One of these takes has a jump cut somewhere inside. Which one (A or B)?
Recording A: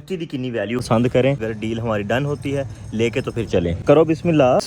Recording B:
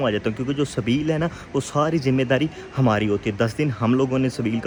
A